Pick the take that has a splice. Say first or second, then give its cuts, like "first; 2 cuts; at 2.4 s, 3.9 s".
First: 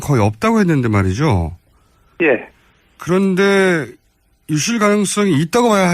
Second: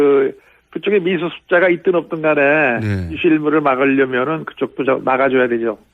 first; 1 cut; at 5.0 s